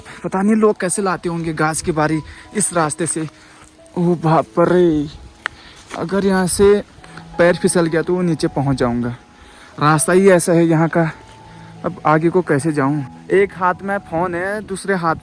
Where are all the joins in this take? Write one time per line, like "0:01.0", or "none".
none